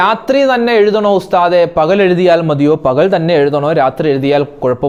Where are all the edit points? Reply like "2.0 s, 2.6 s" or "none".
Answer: none